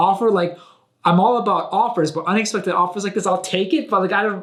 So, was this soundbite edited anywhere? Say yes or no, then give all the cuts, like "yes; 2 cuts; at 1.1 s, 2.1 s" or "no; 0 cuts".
no; 0 cuts